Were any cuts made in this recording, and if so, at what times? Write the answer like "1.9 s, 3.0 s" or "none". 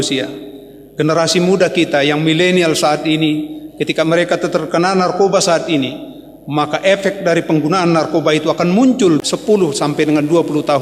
9.2 s